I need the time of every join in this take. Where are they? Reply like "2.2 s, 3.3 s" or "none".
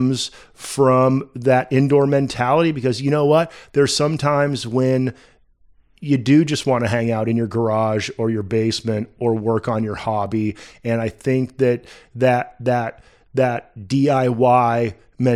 none